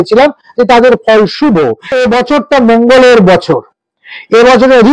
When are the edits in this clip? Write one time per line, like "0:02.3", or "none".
0:02.0